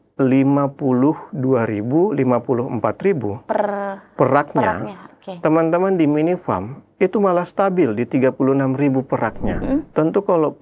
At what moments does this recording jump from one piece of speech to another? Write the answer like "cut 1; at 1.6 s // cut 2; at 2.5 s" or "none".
cut 1; at 9.6 s